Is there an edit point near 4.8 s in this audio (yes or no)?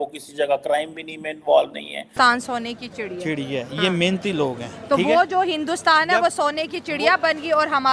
no